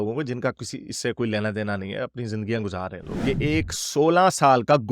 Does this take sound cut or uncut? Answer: cut